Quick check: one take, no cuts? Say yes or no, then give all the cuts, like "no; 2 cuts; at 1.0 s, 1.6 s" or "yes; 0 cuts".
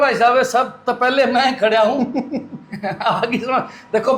yes; 0 cuts